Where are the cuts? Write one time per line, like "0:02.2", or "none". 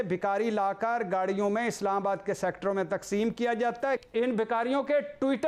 0:04.0